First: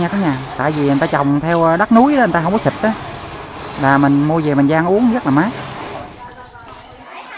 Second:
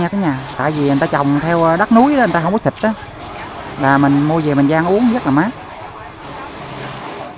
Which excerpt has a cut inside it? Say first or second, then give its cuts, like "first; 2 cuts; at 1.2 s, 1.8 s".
first; 1 cut; at 5.5 s